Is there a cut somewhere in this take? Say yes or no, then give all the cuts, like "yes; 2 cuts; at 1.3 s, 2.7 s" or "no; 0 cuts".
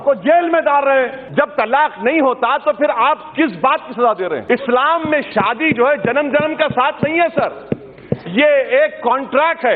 yes; 2 cuts; at 1.2 s, 4.4 s